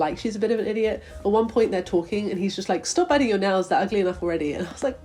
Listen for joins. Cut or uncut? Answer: uncut